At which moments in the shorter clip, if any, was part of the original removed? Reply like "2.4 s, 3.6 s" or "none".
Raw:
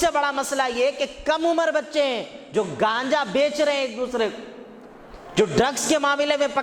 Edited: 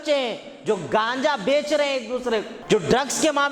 2.5 s